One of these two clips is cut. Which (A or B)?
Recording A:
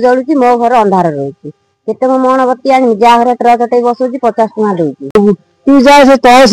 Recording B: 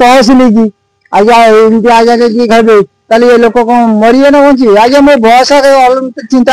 A